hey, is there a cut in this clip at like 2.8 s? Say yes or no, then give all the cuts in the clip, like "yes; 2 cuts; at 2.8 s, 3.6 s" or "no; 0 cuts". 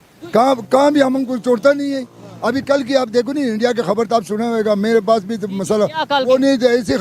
no; 0 cuts